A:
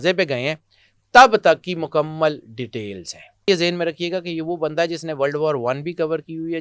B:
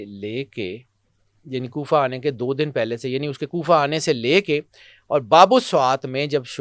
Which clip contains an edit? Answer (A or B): A